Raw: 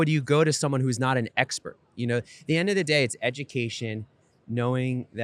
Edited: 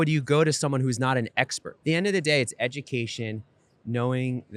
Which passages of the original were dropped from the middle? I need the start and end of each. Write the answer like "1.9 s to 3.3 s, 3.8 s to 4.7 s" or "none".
1.7 s to 2.3 s